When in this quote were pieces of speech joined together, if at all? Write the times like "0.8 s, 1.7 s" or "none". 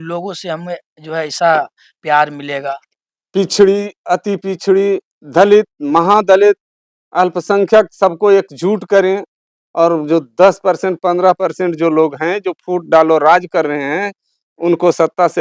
2.9 s